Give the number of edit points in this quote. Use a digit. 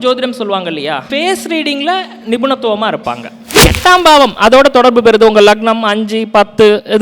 2